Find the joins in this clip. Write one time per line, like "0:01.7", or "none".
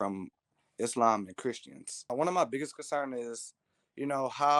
0:02.1